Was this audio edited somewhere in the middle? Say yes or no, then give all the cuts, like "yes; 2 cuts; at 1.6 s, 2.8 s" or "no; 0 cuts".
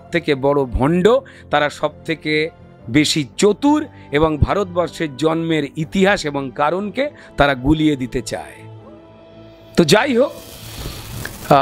no; 0 cuts